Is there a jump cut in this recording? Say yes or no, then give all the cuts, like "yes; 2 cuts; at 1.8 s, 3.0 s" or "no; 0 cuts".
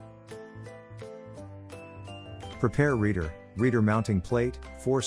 yes; 1 cut; at 2.5 s